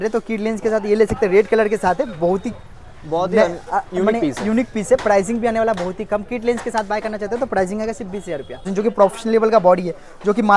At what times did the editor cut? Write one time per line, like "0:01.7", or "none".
0:08.7